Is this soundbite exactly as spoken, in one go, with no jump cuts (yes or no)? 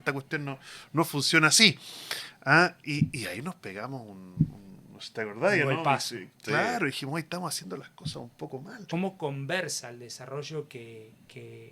no